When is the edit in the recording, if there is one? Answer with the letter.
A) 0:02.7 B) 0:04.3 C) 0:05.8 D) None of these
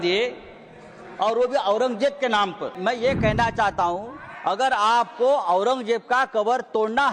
A